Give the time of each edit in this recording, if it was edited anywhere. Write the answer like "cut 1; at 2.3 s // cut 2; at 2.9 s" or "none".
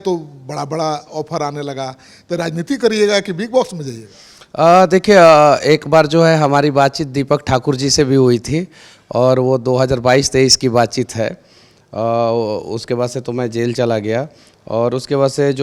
none